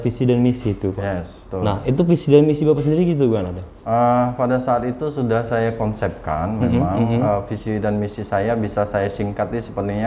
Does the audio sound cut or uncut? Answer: uncut